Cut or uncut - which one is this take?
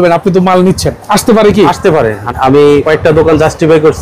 cut